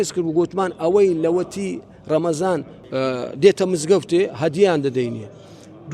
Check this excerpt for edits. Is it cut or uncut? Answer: cut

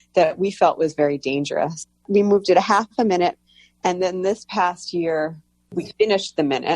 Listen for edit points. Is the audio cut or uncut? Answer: cut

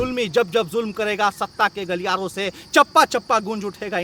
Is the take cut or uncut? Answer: uncut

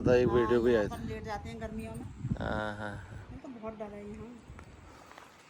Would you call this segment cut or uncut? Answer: uncut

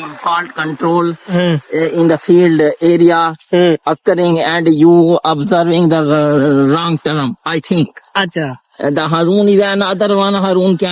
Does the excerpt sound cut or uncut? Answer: uncut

